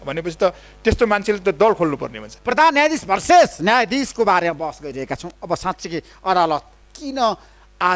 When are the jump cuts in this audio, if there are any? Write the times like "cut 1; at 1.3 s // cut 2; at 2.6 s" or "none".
cut 1; at 2.3 s